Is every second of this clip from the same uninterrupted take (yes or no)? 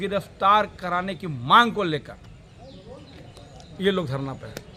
yes